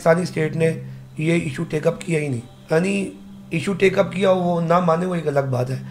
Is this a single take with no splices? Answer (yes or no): no